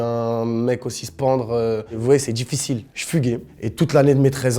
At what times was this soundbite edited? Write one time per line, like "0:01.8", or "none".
0:02.0
0:03.5